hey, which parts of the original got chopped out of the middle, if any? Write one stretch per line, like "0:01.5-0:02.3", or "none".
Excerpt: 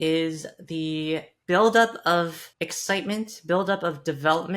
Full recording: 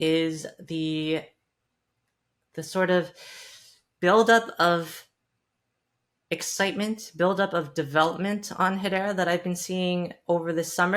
0:01.3-0:03.9
0:05.0-0:06.1